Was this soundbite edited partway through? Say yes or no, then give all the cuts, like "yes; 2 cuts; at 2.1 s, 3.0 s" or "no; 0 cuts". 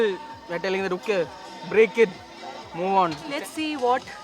yes; 1 cut; at 3.3 s